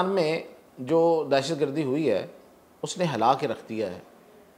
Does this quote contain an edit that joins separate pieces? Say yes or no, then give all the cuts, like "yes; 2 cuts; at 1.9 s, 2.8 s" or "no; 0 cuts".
no; 0 cuts